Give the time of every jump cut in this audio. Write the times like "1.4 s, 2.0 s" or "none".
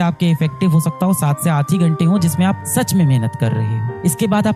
none